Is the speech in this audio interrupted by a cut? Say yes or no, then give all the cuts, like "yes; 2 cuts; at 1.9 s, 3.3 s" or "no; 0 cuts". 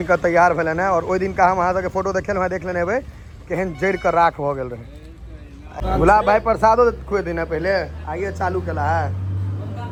no; 0 cuts